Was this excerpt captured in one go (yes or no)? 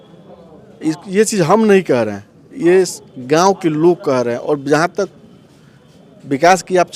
yes